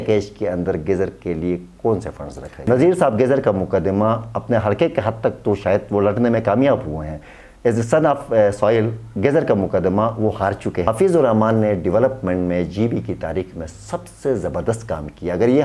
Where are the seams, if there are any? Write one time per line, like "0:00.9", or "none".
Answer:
0:02.4
0:10.8